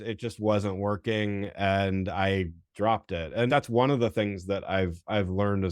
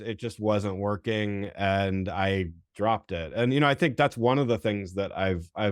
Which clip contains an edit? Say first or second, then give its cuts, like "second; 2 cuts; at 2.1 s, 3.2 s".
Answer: first; 1 cut; at 3.5 s